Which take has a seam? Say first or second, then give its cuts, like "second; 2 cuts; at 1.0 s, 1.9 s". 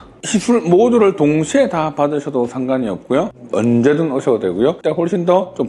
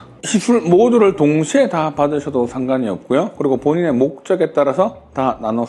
first; 2 cuts; at 3.3 s, 4.8 s